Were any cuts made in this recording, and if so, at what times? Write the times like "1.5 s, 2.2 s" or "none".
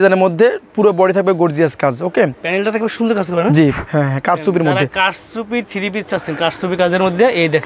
3.8 s